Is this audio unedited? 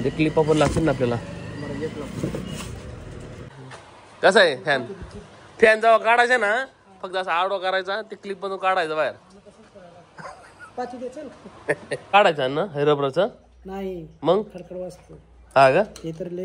no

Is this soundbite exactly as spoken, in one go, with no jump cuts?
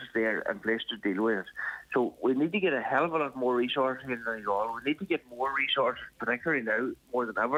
yes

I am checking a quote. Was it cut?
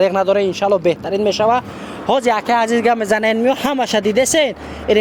no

